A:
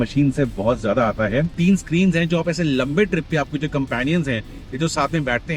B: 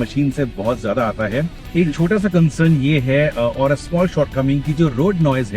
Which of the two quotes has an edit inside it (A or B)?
A